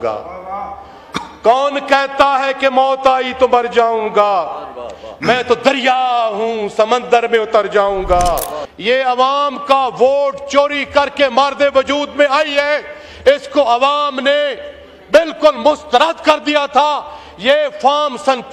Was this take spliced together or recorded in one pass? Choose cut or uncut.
cut